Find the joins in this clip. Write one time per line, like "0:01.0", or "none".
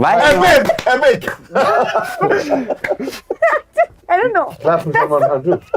none